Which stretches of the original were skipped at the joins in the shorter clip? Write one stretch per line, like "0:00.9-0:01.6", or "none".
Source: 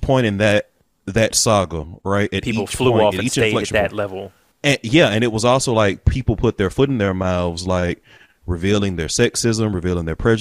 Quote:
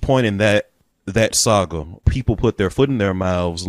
0:02.0-0:06.0